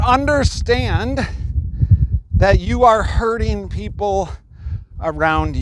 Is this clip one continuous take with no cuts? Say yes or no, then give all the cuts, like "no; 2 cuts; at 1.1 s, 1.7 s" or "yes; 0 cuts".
yes; 0 cuts